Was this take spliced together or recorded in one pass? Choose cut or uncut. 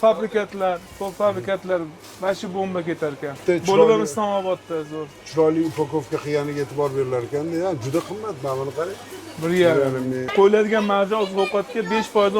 cut